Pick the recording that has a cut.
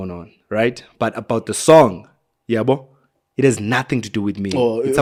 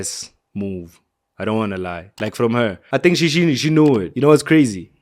second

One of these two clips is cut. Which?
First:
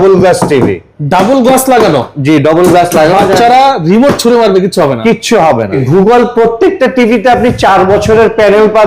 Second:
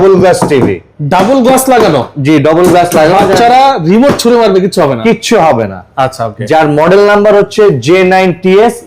first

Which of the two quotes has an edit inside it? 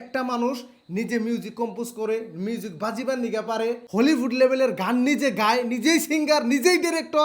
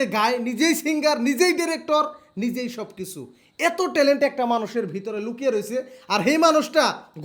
first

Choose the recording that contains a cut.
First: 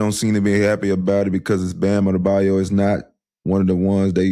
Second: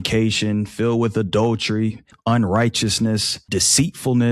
second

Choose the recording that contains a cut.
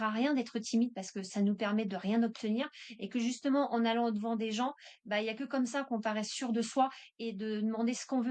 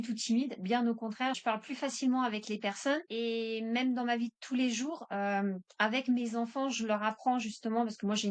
second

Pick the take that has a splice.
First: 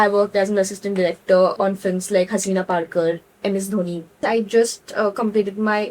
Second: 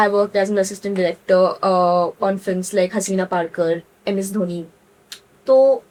first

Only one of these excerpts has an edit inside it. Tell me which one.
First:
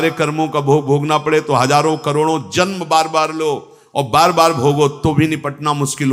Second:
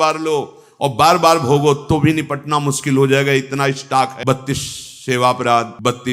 second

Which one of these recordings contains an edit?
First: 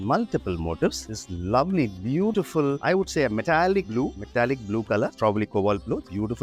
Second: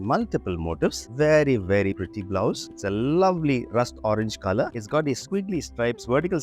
second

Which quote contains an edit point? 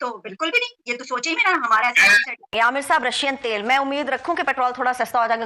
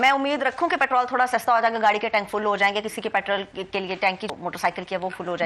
first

